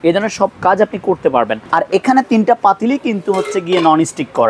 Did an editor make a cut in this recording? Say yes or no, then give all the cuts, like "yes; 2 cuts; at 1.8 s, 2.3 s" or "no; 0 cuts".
yes; 1 cut; at 1.7 s